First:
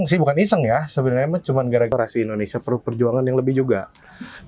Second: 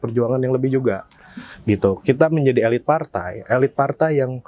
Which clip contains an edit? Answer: first; 1 cut; at 1.9 s

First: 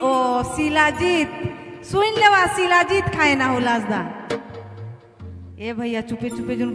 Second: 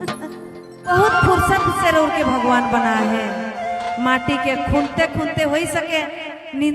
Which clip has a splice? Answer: second; 1 cut; at 0.9 s

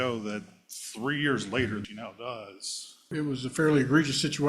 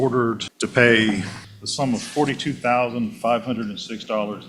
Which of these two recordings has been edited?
first; 2 cuts; at 1.8 s, 3.1 s

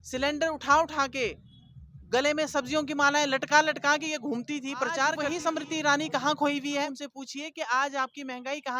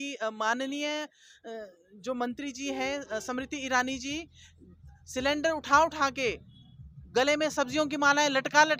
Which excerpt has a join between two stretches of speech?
first; 2 cuts; at 5.3 s, 6.9 s

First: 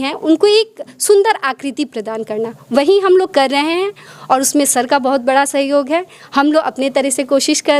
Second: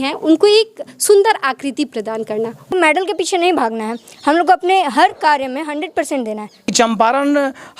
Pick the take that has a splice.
second; 2 cuts; at 2.7 s, 6.7 s

